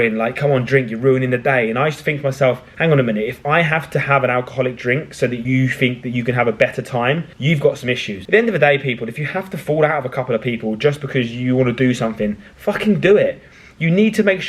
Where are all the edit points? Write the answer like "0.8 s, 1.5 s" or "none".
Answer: 2.7 s, 5.4 s, 7.3 s, 8.1 s